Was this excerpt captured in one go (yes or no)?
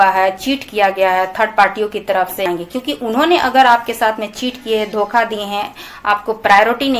no